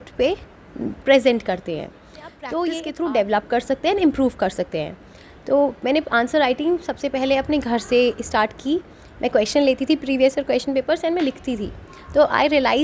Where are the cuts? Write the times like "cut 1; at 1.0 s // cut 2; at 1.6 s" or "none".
cut 1; at 2.8 s

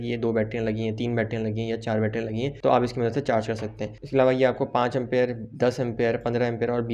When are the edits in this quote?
none

